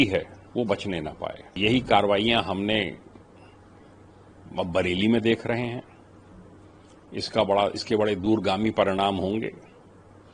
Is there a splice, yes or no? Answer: yes